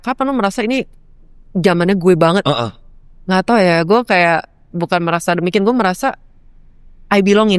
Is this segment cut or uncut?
uncut